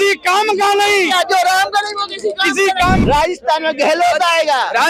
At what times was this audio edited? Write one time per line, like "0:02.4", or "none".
0:03.0